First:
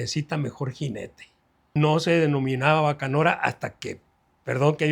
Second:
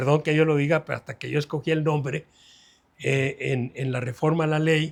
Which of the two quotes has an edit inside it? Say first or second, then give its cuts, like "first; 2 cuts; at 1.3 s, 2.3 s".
first; 1 cut; at 1.7 s